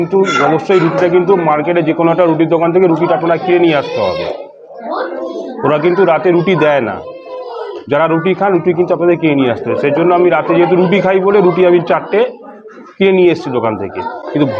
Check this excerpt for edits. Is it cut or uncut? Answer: uncut